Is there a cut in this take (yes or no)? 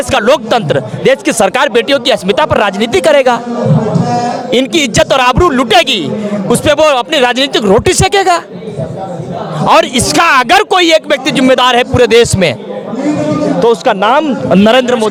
no